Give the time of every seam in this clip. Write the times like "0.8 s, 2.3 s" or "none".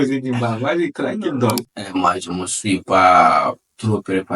1.7 s